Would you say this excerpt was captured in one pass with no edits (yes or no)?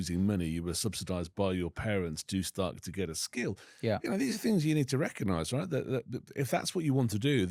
yes